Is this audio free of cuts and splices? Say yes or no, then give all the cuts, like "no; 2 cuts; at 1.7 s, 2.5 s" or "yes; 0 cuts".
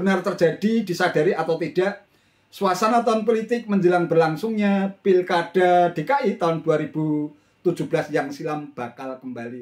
yes; 0 cuts